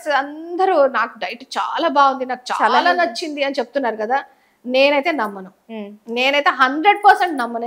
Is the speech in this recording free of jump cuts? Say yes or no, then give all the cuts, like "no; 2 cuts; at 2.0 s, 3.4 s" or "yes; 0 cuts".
yes; 0 cuts